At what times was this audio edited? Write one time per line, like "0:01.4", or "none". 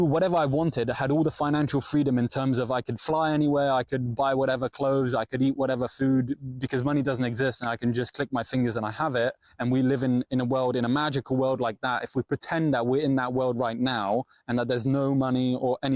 none